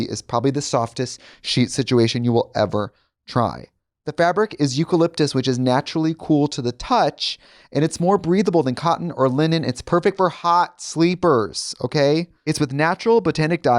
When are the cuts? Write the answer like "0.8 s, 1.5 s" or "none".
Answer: 12.3 s